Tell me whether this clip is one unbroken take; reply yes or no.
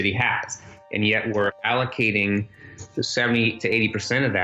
no